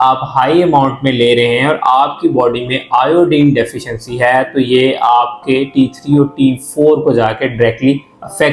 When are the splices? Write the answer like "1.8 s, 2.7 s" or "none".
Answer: none